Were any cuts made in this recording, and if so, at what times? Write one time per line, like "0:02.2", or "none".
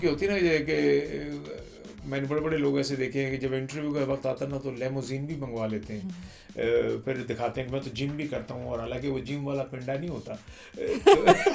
none

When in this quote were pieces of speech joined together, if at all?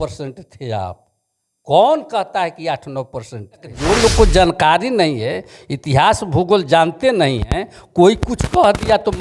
0:03.7

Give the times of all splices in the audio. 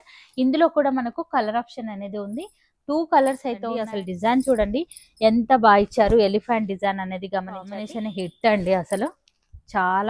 0:03.8
0:07.8

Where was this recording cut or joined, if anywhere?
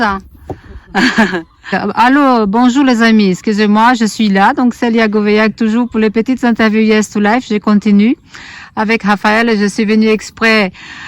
0:01.8

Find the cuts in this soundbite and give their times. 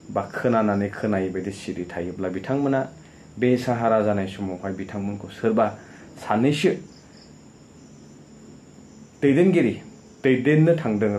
none

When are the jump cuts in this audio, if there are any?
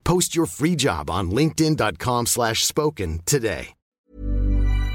0:03.8

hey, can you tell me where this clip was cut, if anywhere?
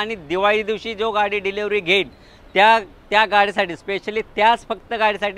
none

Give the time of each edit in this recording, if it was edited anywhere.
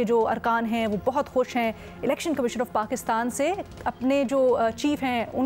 none

